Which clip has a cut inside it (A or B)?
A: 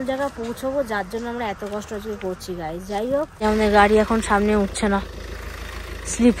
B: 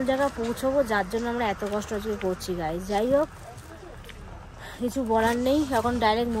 A